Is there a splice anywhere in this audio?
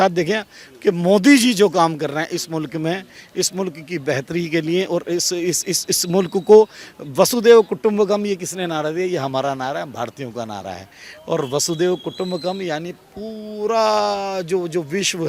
no; 0 cuts

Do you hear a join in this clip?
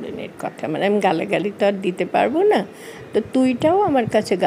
no; 0 cuts

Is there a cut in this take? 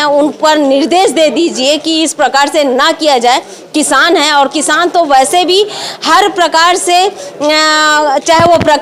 no; 0 cuts

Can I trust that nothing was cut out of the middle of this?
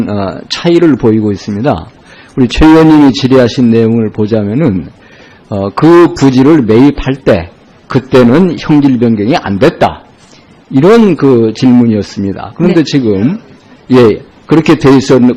no; 1 cut; at 3.2 s

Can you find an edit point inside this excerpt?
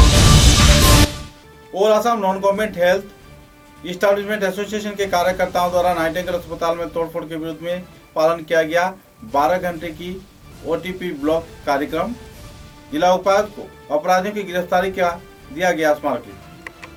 no; 0 cuts

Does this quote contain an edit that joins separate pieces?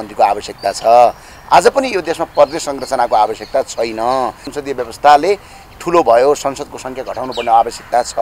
yes; 1 cut; at 4.5 s

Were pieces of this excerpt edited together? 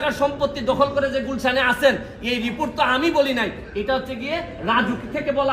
no; 0 cuts

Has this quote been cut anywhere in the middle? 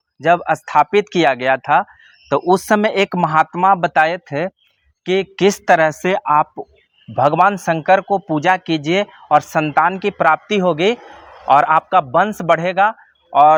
no; 0 cuts

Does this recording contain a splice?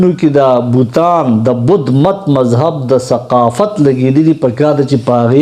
no; 0 cuts

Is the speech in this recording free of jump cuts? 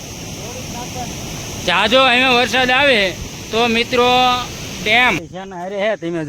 no; 1 cut; at 5.3 s

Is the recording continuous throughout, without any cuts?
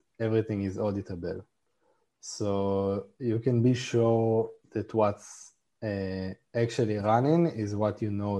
yes; 0 cuts

